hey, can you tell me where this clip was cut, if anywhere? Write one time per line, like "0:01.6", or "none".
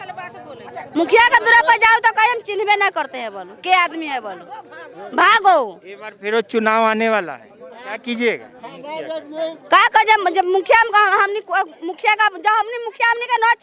none